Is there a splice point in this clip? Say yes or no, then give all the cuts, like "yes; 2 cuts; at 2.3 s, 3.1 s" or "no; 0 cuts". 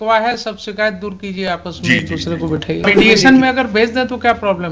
yes; 1 cut; at 2.8 s